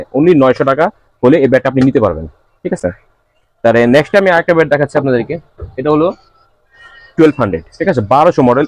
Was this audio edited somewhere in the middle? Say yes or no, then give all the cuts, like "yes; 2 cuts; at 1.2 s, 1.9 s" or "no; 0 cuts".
no; 0 cuts